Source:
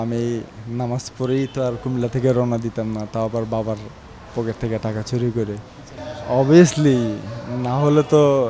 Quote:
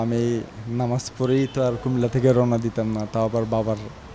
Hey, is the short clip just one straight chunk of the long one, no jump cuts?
yes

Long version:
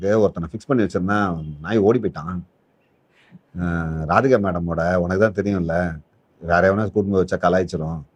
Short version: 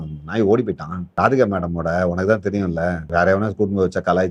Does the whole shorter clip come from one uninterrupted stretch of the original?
no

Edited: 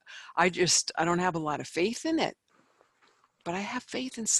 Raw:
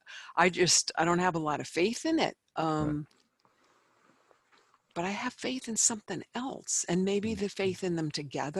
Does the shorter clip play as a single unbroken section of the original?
no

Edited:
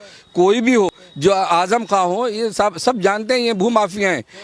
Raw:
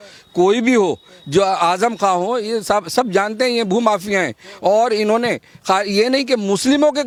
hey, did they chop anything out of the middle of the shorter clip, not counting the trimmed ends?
yes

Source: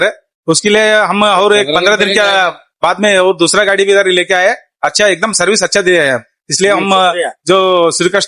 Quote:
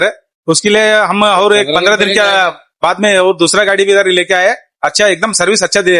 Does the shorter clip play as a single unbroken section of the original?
yes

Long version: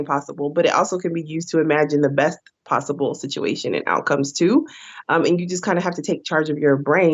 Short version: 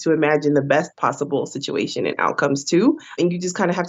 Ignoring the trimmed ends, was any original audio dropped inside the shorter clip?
yes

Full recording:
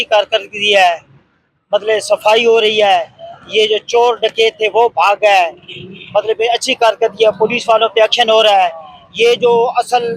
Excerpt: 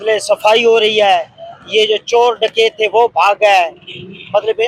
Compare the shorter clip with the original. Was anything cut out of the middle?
no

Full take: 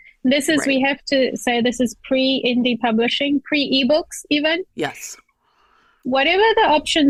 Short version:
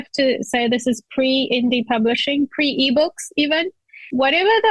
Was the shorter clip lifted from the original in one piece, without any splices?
no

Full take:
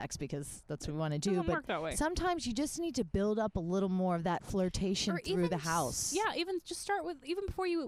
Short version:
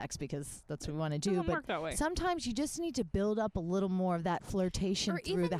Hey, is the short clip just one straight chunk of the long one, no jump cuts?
yes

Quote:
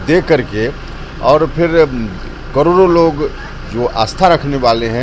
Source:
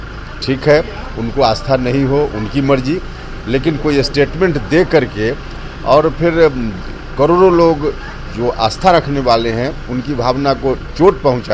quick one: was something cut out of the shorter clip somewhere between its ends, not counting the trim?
no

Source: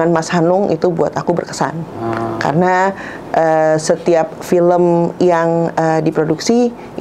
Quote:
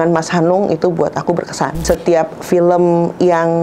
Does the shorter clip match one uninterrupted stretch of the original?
no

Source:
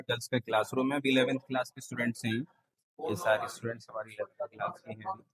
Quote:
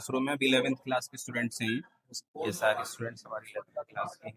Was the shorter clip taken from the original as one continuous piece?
yes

